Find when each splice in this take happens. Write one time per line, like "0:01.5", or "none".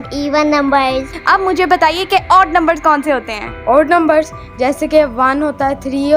0:01.1